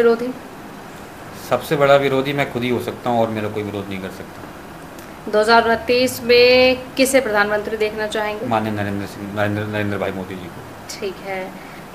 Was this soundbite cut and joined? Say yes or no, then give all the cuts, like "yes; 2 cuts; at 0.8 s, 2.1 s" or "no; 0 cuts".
no; 0 cuts